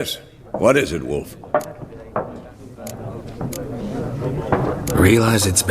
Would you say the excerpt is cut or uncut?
cut